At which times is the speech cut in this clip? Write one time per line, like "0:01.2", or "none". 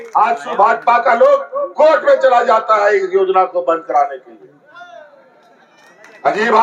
none